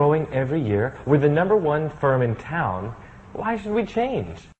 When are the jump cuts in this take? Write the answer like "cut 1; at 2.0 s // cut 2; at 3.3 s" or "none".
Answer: cut 1; at 1.0 s